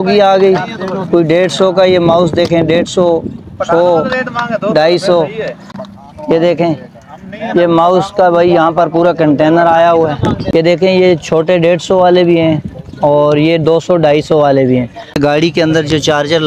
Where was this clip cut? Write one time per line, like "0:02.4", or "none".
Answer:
0:10.4
0:15.2